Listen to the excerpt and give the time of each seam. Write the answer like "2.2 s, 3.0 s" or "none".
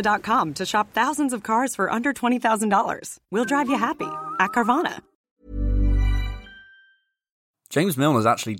7.6 s